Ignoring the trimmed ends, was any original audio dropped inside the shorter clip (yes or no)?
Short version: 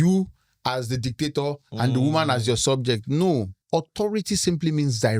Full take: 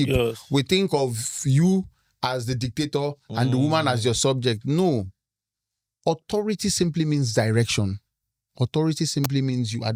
yes